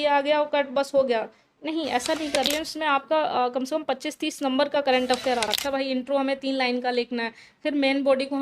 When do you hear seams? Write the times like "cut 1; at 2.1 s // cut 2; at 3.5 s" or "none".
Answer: cut 1; at 2.3 s // cut 2; at 5.6 s